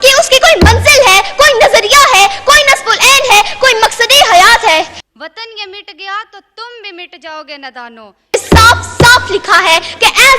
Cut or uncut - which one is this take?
cut